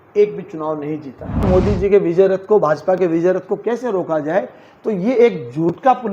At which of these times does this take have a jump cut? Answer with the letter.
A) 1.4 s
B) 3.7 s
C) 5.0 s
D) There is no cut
A